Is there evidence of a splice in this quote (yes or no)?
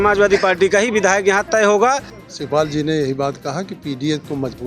yes